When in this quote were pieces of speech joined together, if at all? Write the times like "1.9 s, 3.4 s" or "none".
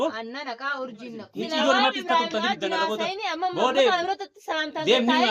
1.2 s